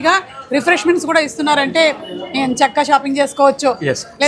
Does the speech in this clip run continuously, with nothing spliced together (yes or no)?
yes